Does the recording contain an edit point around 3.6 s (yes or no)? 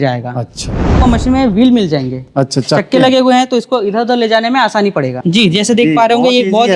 no